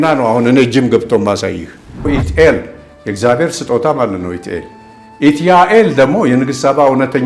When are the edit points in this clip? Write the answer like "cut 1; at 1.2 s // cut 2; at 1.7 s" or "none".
cut 1; at 2.1 s